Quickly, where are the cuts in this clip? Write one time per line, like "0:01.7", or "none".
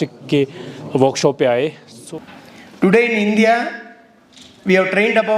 0:01.9